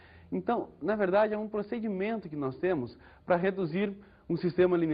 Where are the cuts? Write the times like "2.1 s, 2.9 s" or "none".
none